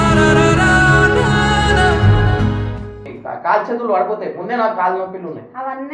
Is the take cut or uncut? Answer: cut